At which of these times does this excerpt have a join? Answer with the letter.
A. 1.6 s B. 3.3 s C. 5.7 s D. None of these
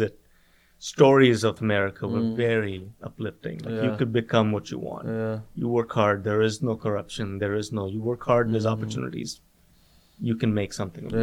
A